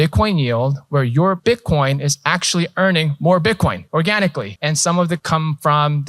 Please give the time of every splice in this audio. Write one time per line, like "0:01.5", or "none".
0:01.4
0:03.8
0:04.5
0:05.2